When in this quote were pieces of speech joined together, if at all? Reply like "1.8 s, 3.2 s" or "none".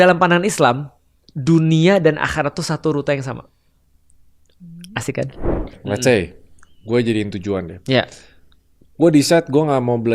5.8 s